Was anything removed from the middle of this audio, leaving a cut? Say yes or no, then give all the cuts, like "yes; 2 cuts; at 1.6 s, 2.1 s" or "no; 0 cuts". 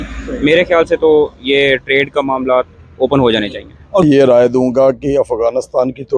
yes; 1 cut; at 4.0 s